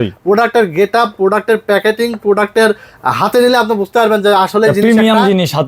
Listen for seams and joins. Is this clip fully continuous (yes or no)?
yes